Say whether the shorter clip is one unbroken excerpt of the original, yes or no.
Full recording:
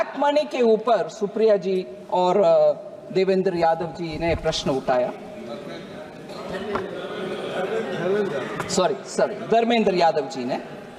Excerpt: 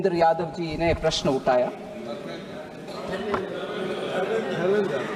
yes